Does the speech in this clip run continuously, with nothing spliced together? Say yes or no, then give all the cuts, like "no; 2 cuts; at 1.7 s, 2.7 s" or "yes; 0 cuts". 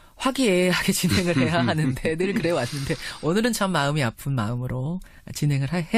yes; 0 cuts